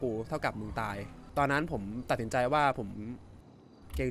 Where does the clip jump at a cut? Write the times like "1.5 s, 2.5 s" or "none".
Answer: 1.1 s